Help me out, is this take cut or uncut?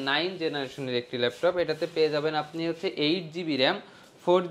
uncut